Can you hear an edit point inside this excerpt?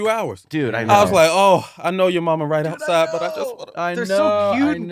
no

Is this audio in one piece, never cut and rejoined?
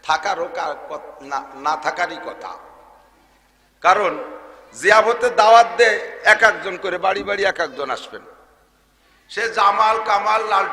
yes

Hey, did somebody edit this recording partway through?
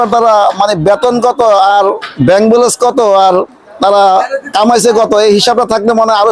no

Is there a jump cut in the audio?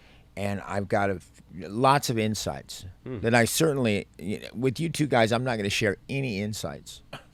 no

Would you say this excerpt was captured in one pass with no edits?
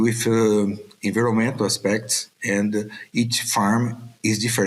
yes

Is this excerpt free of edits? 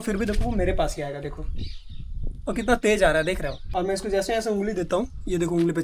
no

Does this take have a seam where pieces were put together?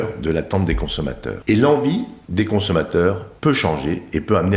yes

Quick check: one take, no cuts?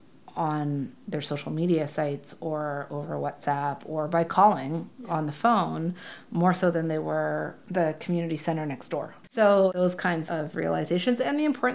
yes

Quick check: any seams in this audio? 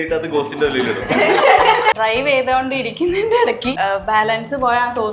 yes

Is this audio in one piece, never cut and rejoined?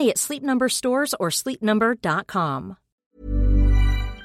no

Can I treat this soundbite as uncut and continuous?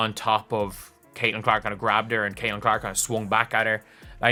yes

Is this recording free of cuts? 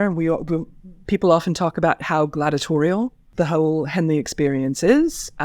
no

